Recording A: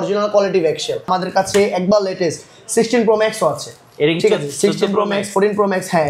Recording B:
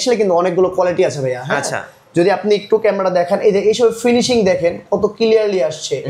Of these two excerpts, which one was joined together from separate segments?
A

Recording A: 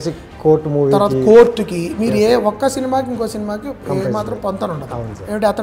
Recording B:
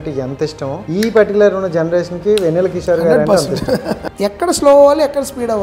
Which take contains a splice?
B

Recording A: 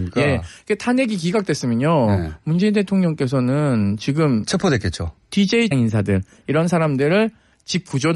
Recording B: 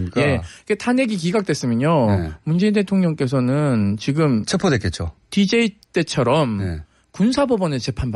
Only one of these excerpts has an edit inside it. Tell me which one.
B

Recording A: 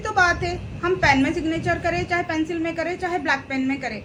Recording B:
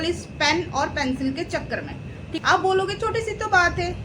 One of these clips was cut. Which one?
B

